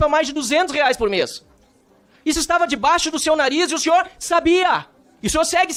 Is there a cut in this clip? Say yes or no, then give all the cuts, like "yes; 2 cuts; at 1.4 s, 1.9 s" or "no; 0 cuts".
no; 0 cuts